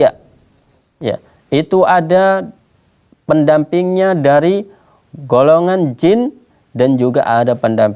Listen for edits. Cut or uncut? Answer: uncut